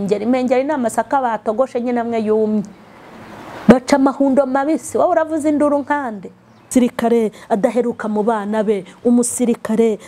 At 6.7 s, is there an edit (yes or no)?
yes